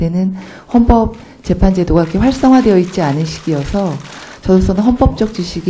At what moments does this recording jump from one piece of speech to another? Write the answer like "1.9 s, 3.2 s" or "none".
1.1 s